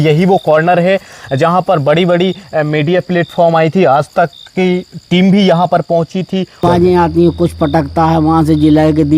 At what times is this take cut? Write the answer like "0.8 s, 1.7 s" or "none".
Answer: 6.6 s